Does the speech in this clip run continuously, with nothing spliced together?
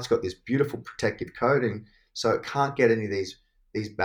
yes; 0 cuts

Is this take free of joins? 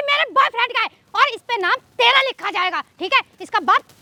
yes; 0 cuts

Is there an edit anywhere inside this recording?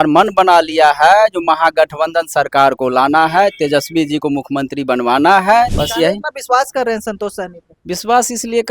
yes; 1 cut; at 5.8 s

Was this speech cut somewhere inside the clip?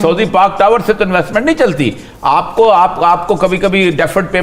no; 0 cuts

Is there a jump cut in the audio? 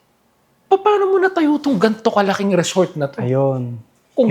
no; 0 cuts

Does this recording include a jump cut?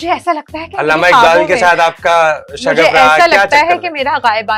no; 0 cuts

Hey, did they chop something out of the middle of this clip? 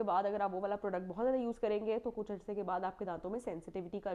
no; 0 cuts

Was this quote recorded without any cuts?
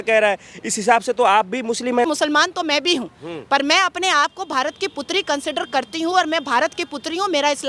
no; 1 cut; at 2.1 s

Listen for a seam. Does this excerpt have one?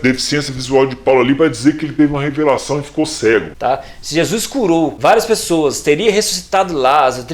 yes; 1 cut; at 3.5 s

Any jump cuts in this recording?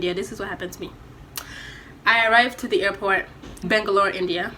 yes; 1 cut; at 3.6 s

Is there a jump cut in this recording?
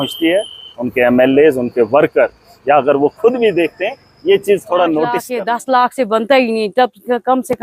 yes; 1 cut; at 5.3 s

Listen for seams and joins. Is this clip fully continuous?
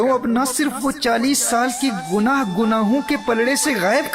no; 1 cut; at 1.0 s

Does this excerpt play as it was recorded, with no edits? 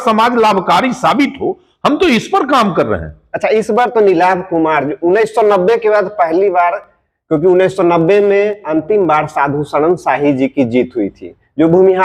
yes; 0 cuts

